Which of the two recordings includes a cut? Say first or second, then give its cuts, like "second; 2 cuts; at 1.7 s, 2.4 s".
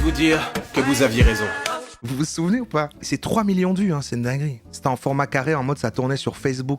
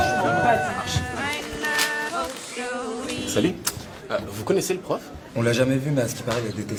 first; 3 cuts; at 1.9 s, 2.9 s, 4.5 s